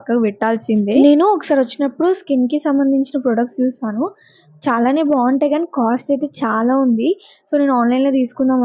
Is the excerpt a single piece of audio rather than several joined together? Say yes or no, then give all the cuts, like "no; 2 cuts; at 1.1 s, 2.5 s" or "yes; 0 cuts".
yes; 0 cuts